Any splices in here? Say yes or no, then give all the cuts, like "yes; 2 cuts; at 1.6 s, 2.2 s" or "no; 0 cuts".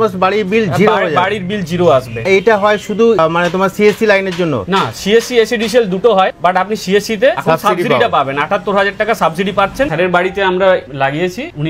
no; 0 cuts